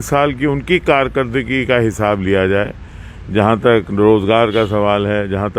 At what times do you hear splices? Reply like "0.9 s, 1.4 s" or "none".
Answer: none